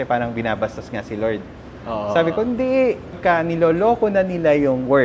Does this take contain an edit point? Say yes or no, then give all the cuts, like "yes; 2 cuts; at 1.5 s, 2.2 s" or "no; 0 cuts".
yes; 1 cut; at 3.2 s